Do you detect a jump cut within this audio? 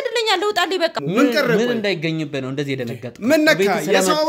yes; 1 cut; at 0.9 s

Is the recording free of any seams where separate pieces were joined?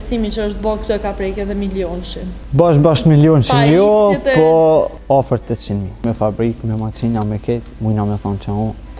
no; 3 cuts; at 2.4 s, 5.0 s, 6.0 s

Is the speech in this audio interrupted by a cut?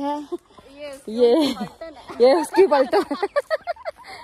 no; 0 cuts

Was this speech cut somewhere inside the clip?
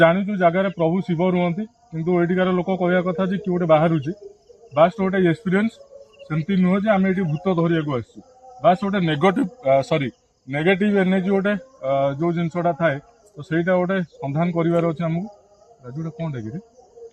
no; 0 cuts

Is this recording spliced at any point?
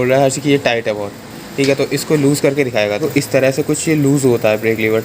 yes; 1 cut; at 3.0 s

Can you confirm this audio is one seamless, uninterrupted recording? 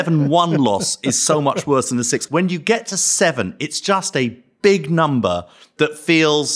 no; 1 cut; at 2.2 s

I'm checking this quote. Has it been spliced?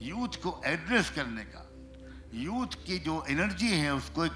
no; 0 cuts

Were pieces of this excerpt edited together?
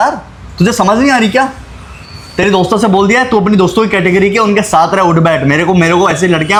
no; 0 cuts

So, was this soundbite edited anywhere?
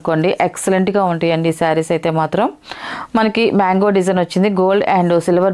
no; 0 cuts

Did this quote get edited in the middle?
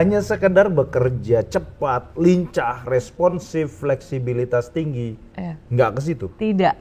no; 0 cuts

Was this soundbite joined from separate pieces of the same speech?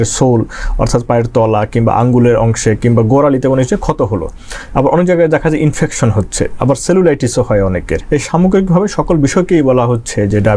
yes; 1 cut; at 8.0 s

